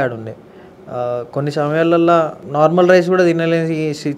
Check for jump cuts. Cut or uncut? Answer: cut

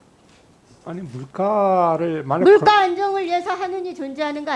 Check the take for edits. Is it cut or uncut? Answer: uncut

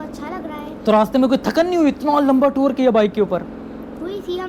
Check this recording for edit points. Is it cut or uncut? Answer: uncut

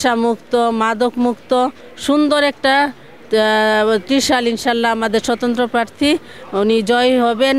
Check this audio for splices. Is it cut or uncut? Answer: uncut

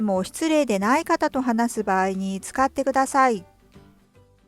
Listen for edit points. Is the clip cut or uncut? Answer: cut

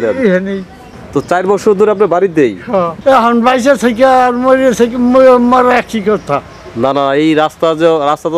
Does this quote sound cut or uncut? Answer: cut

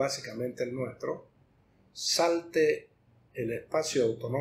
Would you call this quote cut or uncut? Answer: uncut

